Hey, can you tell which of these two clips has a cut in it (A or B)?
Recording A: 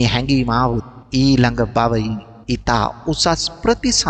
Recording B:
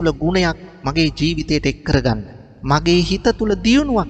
A